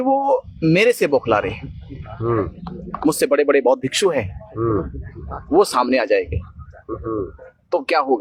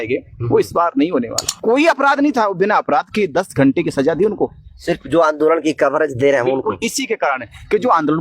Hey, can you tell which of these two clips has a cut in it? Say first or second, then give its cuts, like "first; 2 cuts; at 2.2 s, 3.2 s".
second; 1 cut; at 1.4 s